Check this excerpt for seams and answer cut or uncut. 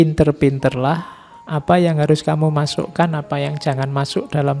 uncut